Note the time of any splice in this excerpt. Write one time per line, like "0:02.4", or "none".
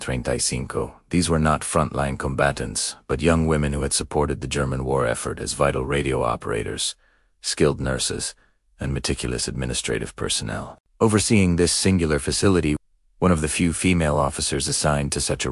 0:12.8